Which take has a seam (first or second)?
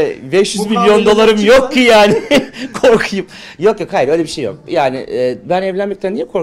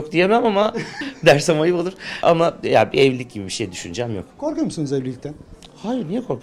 second